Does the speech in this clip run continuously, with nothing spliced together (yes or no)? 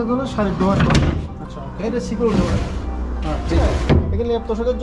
yes